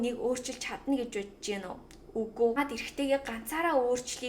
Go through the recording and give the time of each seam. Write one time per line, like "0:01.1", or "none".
0:02.6